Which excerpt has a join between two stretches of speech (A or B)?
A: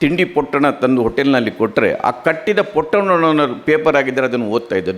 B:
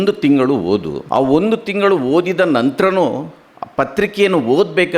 B